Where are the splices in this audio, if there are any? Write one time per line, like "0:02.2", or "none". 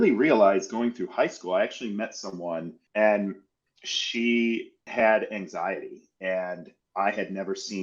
0:02.8
0:04.8